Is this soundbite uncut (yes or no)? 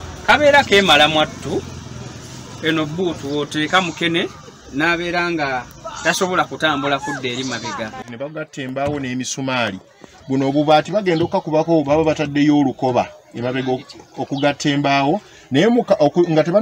no